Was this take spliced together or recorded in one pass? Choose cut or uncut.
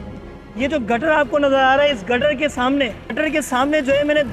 cut